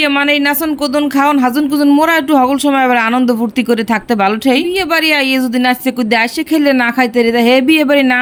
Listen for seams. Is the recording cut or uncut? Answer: uncut